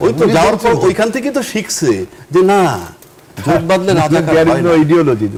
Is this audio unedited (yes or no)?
yes